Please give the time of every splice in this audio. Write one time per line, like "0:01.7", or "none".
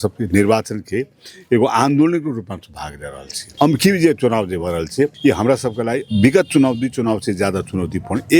0:03.4
0:05.1
0:06.1

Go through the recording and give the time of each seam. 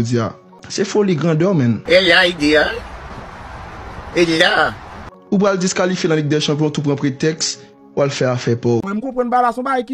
none

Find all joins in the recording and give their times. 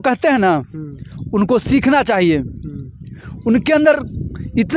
none

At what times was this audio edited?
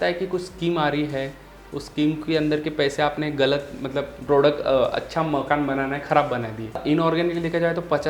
0:06.8

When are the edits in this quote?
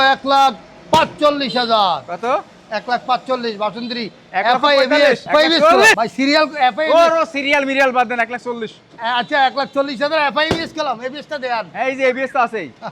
none

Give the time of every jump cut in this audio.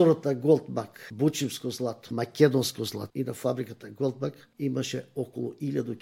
0:01.0
0:02.0
0:03.0
0:04.5

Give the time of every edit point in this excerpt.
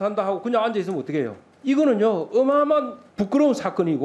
0:01.4
0:03.0

